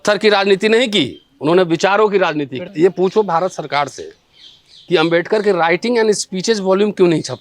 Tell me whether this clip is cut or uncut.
cut